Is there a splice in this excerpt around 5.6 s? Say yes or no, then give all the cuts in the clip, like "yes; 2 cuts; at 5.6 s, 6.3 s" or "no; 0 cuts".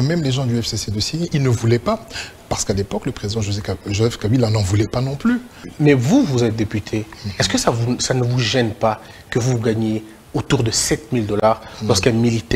yes; 1 cut; at 5.6 s